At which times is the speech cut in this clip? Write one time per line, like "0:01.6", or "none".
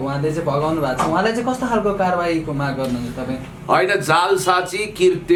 none